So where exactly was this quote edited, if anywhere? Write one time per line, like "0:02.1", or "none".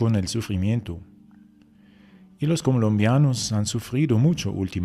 0:01.2